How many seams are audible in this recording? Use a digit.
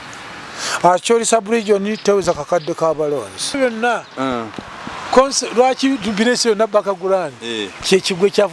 1